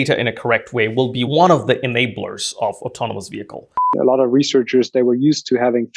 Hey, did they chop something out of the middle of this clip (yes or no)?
yes